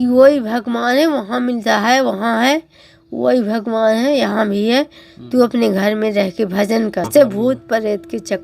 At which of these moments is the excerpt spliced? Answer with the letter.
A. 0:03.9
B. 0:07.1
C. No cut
B